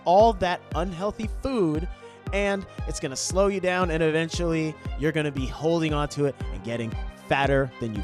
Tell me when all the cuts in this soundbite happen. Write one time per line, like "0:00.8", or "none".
none